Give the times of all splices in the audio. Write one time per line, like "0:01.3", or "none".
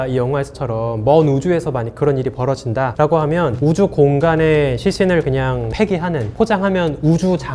0:03.6